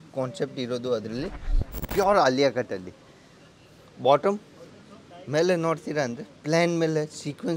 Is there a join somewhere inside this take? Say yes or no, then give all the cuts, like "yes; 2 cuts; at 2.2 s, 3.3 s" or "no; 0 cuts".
yes; 1 cut; at 1.7 s